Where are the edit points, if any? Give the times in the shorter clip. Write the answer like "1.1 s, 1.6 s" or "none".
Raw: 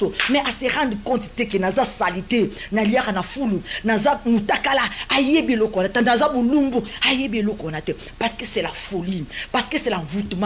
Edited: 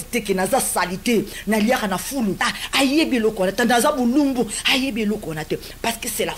2.5 s